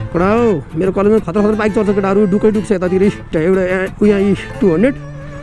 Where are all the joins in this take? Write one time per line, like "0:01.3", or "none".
0:03.3